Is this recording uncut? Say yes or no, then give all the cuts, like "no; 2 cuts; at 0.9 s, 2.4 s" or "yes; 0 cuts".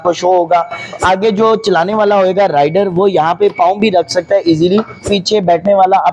no; 2 cuts; at 1.0 s, 5.0 s